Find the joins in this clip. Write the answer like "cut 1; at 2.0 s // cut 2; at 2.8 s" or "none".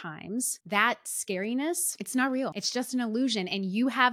cut 1; at 1.9 s // cut 2; at 2.6 s